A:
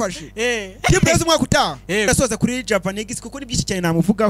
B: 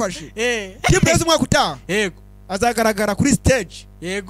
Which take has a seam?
A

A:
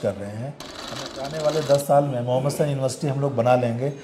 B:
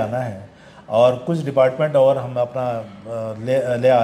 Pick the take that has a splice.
A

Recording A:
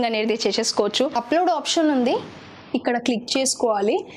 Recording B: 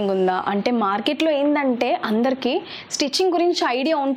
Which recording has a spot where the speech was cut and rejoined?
A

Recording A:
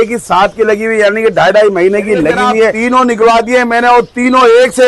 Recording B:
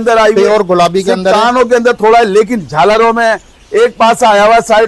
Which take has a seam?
A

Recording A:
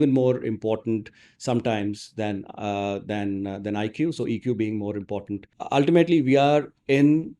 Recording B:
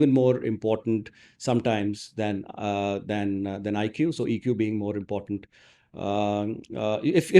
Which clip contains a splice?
A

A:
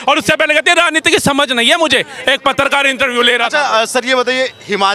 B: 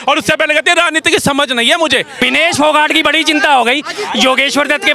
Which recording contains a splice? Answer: B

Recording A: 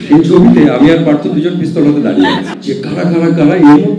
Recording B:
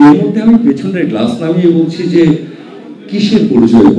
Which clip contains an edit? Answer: A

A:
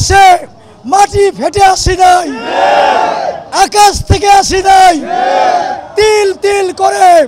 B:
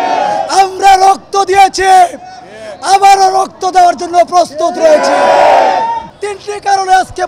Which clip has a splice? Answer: B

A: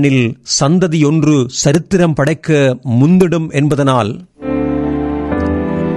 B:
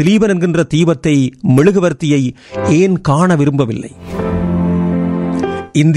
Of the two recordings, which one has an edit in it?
B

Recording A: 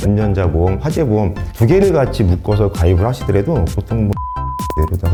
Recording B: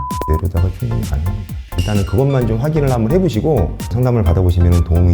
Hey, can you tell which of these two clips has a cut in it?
B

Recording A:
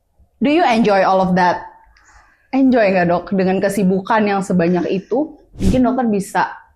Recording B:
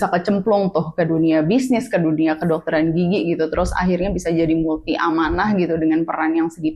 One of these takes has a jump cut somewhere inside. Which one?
A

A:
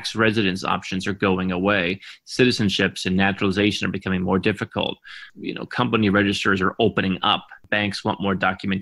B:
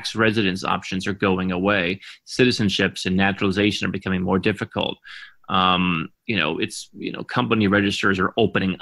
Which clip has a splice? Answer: A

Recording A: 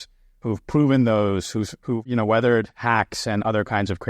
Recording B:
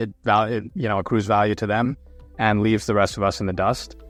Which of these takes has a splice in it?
A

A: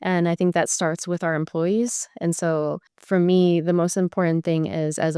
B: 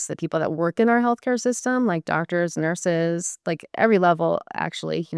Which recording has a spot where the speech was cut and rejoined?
A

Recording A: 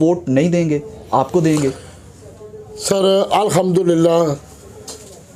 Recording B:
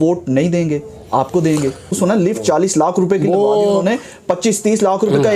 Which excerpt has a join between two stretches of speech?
B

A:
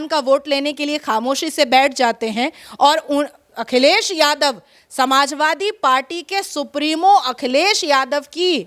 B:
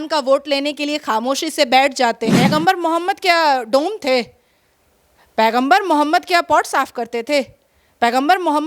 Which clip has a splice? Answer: B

